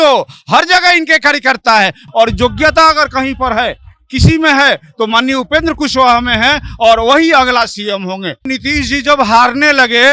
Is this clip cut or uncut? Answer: cut